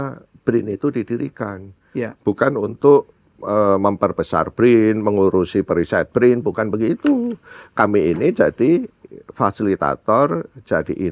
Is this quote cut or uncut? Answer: uncut